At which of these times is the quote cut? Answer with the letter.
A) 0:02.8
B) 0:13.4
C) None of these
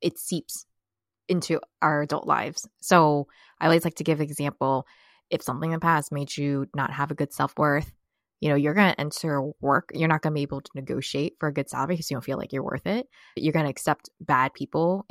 B